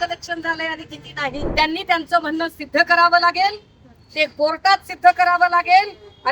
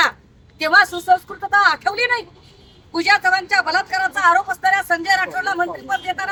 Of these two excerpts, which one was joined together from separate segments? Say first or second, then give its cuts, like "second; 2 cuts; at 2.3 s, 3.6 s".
first; 1 cut; at 1.5 s